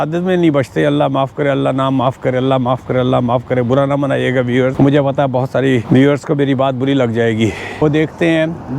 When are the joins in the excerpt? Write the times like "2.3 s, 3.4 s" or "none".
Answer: 4.7 s, 5.8 s, 7.8 s

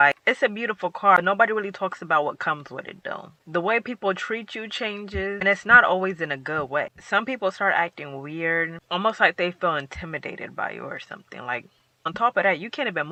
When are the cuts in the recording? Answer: none

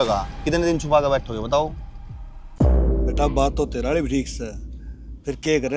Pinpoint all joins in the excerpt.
none

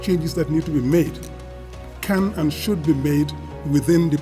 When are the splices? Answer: none

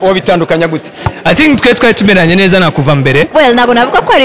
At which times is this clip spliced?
3.3 s

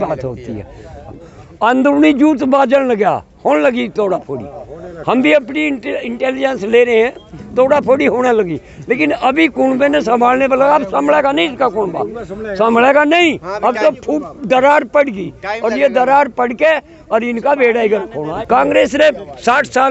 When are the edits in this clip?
1.1 s, 18.2 s

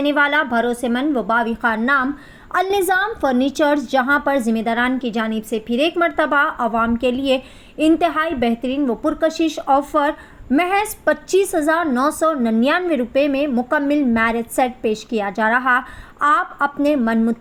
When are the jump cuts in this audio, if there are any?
none

